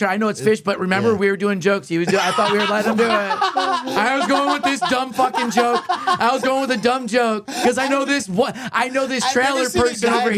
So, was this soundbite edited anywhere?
yes; 1 cut; at 7.5 s

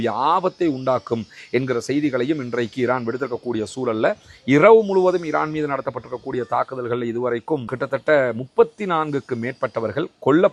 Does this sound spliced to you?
no; 0 cuts

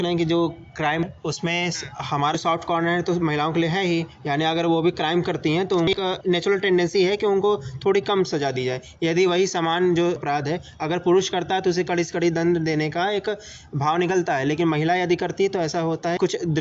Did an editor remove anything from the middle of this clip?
no; 0 cuts

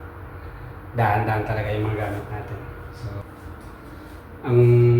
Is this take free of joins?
no; 1 cut; at 3.2 s

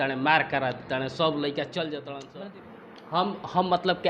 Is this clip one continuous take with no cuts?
no; 1 cut; at 2.2 s

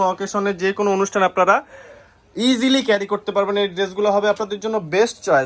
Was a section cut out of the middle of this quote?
no; 0 cuts

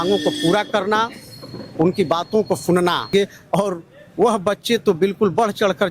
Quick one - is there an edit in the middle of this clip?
yes; 1 cut; at 3.1 s

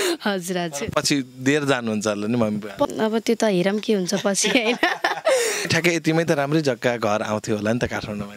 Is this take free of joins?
no; 2 cuts; at 2.9 s, 5.7 s

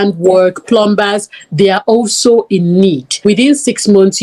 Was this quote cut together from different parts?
yes; 1 cut; at 3.1 s

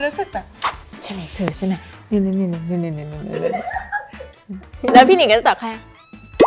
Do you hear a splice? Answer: no; 0 cuts

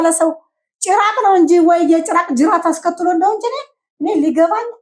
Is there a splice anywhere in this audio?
no; 0 cuts

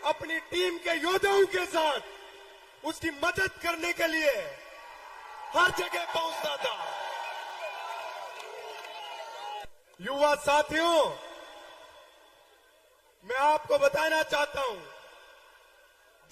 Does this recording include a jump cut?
no; 0 cuts

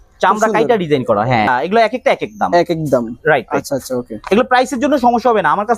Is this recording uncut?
no; 1 cut; at 1.5 s

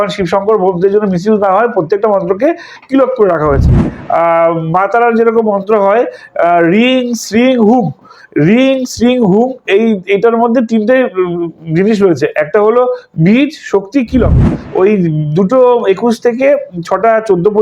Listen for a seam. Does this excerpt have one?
yes; 2 cuts; at 3.9 s, 14.6 s

